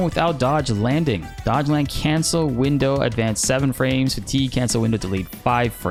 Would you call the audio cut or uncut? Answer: uncut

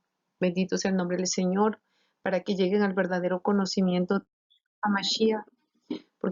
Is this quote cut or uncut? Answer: uncut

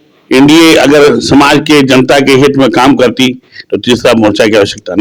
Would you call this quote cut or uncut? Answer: uncut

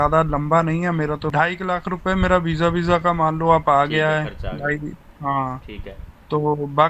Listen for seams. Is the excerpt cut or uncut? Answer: cut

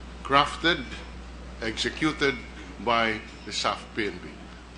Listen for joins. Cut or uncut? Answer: cut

